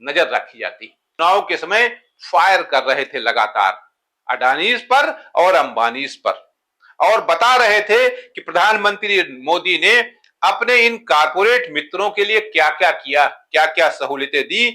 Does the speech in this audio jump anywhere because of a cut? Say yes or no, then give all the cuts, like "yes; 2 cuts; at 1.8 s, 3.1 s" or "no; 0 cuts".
yes; 1 cut; at 1.1 s